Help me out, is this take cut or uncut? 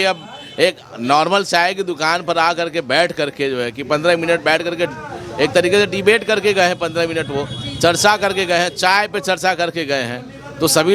uncut